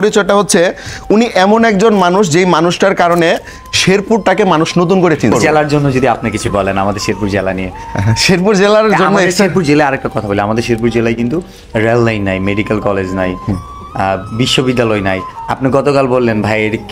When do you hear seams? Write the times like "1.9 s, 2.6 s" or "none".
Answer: 5.3 s